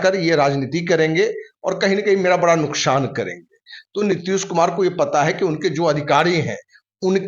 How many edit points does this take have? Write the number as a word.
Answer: zero